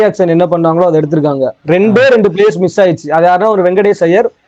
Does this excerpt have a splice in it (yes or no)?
no